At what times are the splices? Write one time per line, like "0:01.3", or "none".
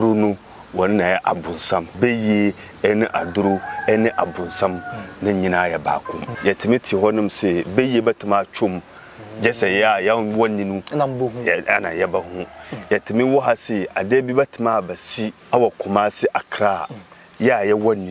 0:01.9
0:06.3
0:15.4